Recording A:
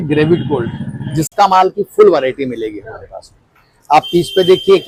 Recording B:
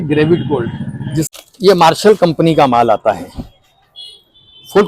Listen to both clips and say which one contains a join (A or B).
B